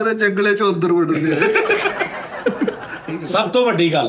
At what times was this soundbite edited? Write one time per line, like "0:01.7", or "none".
0:02.9